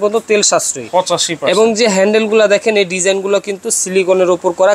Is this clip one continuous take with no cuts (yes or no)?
yes